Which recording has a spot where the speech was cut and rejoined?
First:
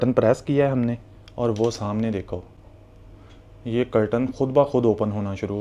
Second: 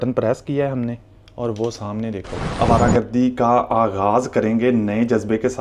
second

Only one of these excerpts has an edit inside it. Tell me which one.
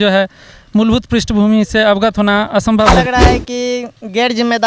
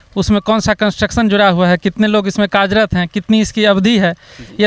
first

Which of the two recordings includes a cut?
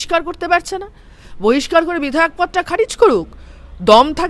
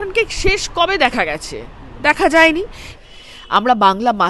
second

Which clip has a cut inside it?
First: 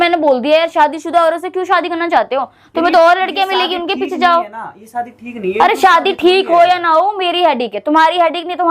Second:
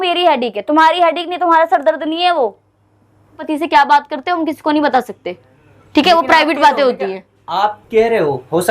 second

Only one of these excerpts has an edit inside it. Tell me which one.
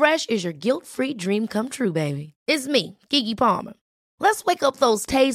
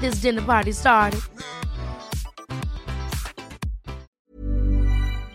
second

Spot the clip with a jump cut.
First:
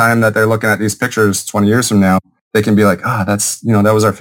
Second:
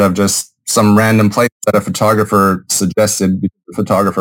first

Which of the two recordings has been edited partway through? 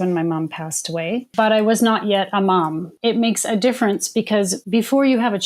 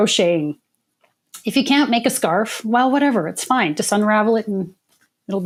first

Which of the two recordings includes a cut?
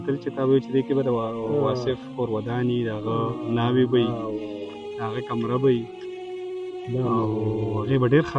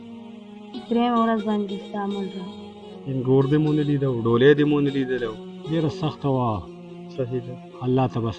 second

